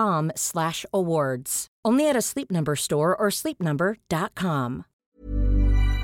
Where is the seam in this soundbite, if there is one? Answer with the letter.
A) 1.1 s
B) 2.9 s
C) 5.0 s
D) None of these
C